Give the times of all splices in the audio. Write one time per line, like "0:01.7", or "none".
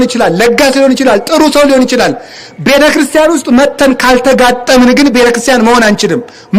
none